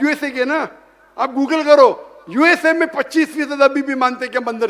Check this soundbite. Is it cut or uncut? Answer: uncut